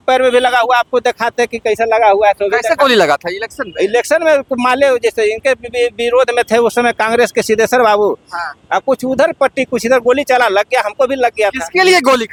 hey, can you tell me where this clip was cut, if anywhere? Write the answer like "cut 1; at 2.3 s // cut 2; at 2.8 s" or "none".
none